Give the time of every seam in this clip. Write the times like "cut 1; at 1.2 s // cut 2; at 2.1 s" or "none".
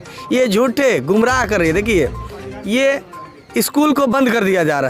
none

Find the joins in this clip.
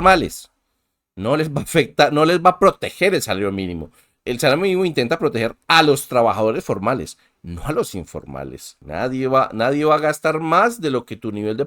cut 1; at 8.8 s

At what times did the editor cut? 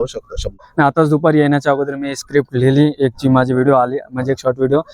cut 1; at 0.9 s

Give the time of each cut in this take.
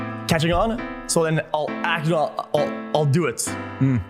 cut 1; at 3.1 s

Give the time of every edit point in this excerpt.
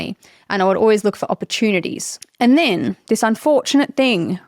cut 1; at 2.2 s

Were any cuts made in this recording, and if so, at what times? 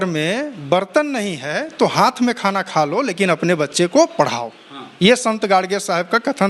none

